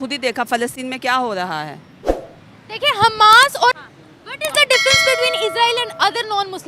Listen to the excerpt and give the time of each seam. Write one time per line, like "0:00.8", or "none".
0:03.8

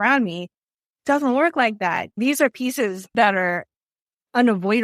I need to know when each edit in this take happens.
0:02.2
0:03.1

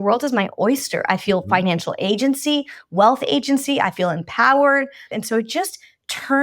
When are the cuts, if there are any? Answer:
0:05.1

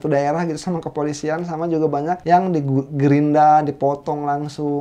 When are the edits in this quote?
0:02.2

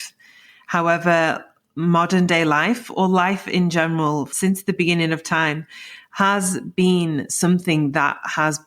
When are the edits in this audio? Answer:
0:04.3

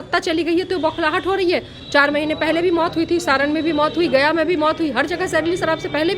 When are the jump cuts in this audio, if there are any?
none

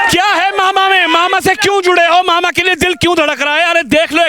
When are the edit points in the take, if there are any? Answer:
none

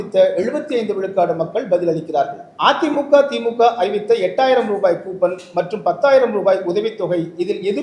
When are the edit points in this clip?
0:02.4

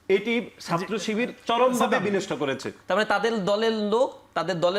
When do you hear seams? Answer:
0:02.7

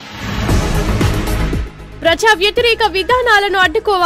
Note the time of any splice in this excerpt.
none

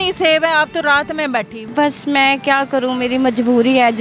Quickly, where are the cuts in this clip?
0:01.6

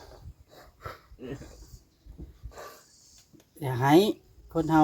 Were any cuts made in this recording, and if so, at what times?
none

